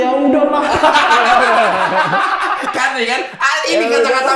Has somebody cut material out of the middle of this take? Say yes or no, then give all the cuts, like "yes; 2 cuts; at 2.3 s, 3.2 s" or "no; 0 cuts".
no; 0 cuts